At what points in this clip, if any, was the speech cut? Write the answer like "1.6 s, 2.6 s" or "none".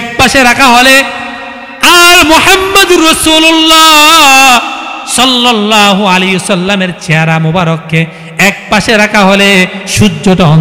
none